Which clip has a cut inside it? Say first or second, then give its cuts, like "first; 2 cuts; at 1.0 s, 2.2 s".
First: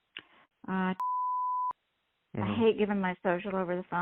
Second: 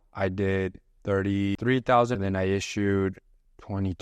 second; 2 cuts; at 1.5 s, 2.1 s